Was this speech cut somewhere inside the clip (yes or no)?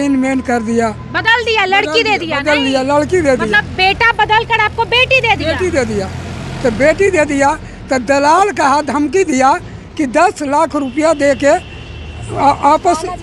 no